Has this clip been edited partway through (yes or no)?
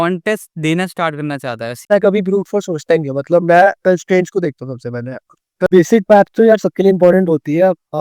yes